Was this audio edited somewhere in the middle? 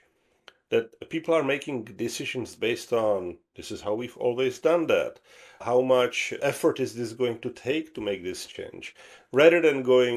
yes; 3 cuts; at 0.9 s, 5.6 s, 6.4 s

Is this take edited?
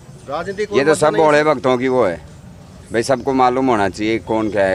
no; 0 cuts

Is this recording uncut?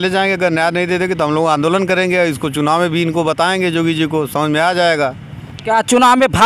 yes; 0 cuts

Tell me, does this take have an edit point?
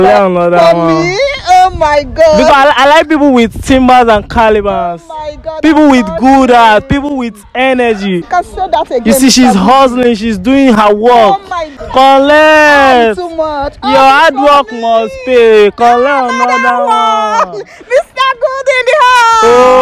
yes; 2 cuts; at 8.3 s, 11.7 s

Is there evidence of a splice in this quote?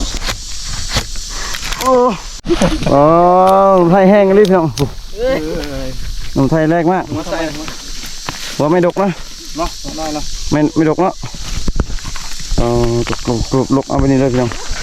yes; 1 cut; at 2.3 s

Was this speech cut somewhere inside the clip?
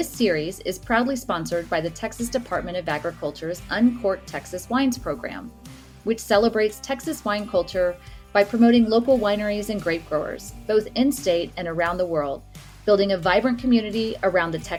no; 0 cuts

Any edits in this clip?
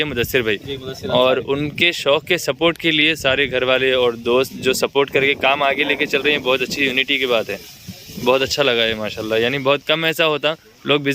no; 0 cuts

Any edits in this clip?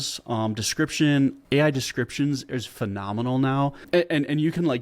yes; 2 cuts; at 1.4 s, 3.8 s

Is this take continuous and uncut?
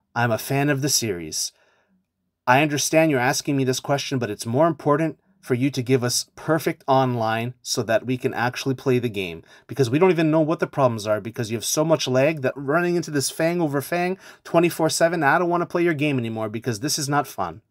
no; 1 cut; at 12.5 s

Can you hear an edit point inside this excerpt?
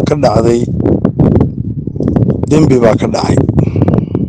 no; 0 cuts

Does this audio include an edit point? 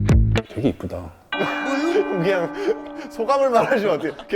yes; 1 cut; at 1.2 s

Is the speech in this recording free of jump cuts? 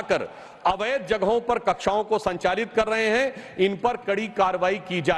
yes; 0 cuts

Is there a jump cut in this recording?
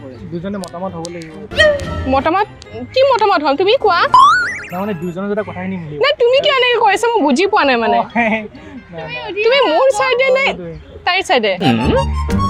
no; 0 cuts

